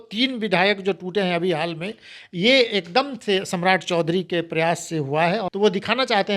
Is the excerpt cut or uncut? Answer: cut